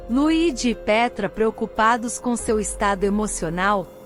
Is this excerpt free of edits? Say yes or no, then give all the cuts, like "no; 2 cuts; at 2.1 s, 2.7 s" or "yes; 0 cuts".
yes; 0 cuts